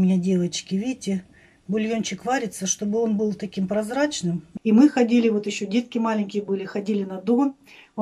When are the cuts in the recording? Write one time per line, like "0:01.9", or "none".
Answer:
0:04.5